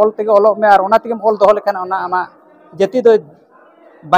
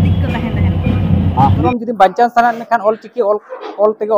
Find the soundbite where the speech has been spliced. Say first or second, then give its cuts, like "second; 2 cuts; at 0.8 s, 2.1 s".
second; 1 cut; at 1.7 s